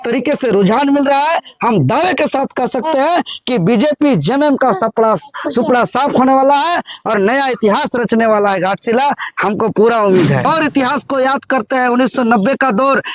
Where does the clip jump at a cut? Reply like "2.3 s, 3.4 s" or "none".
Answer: 10.4 s